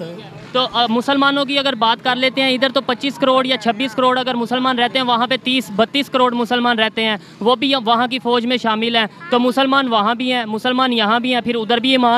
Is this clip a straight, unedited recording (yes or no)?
yes